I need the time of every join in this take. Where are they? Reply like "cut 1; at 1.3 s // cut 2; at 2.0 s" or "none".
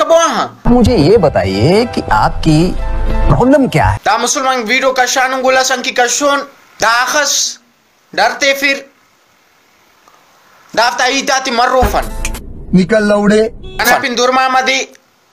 cut 1; at 4.0 s // cut 2; at 6.6 s // cut 3; at 14.0 s